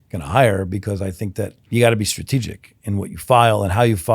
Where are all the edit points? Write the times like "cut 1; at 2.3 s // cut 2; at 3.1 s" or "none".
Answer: cut 1; at 1.6 s